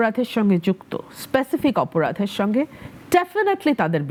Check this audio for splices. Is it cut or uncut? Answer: uncut